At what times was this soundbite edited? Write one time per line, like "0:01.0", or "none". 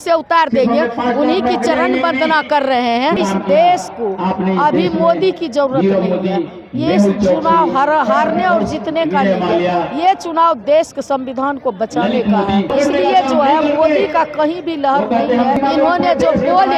0:03.2
0:12.7
0:15.6